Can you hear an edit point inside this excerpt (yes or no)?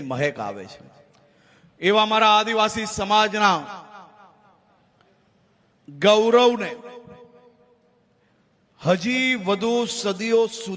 no